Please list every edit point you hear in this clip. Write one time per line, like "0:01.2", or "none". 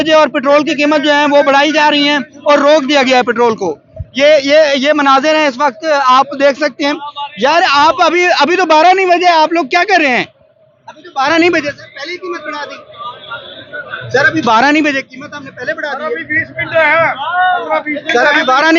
none